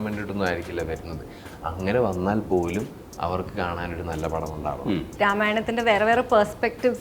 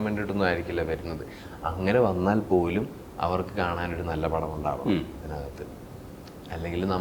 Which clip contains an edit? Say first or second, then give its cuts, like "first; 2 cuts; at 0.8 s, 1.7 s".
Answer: first; 1 cut; at 5.1 s